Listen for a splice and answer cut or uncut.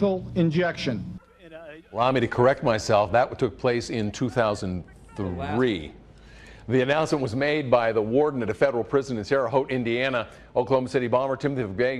cut